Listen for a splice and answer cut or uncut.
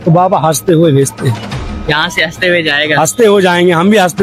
uncut